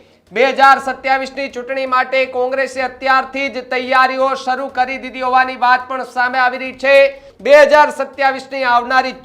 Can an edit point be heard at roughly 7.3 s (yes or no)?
yes